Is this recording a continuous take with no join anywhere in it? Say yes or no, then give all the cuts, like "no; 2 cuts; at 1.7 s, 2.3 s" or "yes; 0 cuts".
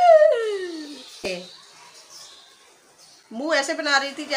no; 1 cut; at 1.3 s